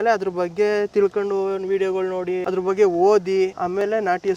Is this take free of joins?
no; 2 cuts; at 2.4 s, 3.6 s

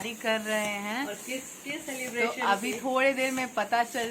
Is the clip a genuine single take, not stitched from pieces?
yes; 0 cuts

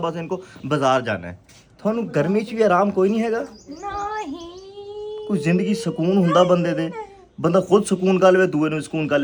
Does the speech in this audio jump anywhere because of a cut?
no; 0 cuts

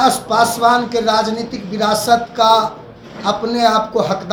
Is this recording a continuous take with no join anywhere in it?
yes; 0 cuts

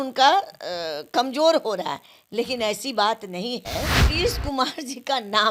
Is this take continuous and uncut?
no; 1 cut; at 4.1 s

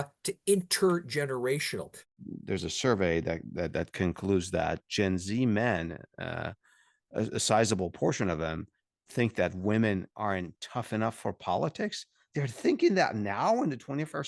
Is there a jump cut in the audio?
yes; 1 cut; at 2.1 s

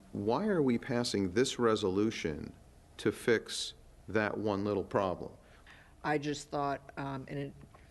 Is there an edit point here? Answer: yes; 1 cut; at 5.6 s

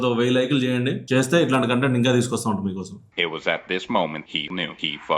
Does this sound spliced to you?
yes; 1 cut; at 3.0 s

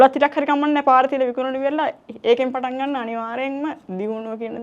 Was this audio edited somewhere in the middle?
no; 0 cuts

